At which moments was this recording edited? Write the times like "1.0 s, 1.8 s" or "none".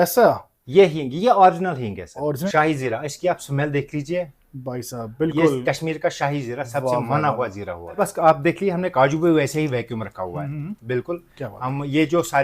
2.4 s, 8.0 s